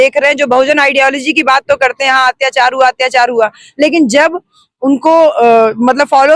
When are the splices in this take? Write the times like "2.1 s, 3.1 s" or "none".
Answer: none